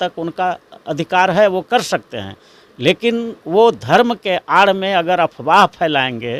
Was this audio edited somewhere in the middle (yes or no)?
no